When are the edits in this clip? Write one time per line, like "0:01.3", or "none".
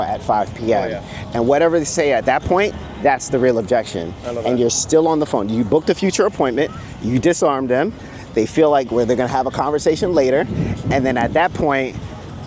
none